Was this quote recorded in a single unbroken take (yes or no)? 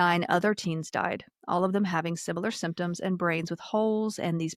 yes